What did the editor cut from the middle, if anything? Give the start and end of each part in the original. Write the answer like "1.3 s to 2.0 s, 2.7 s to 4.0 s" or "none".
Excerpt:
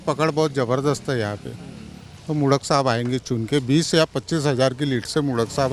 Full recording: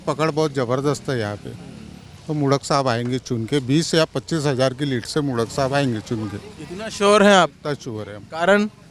none